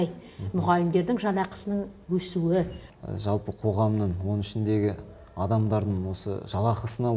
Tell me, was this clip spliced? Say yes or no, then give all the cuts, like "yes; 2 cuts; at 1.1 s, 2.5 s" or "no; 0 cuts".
yes; 1 cut; at 2.8 s